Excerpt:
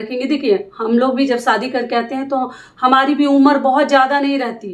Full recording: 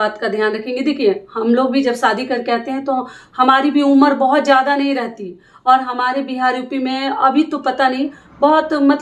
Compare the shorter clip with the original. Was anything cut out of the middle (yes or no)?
no